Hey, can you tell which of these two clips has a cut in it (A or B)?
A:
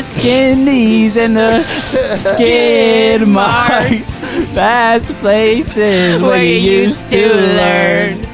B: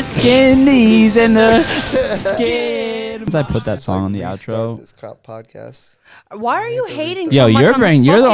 B